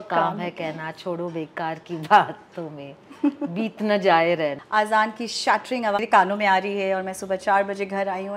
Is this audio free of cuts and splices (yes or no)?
no